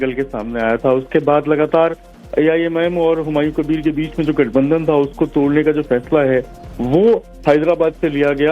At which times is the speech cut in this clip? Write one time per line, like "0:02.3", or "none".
0:01.1